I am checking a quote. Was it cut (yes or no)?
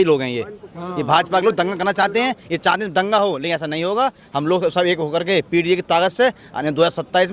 no